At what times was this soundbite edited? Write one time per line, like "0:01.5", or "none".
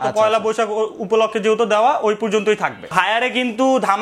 0:02.9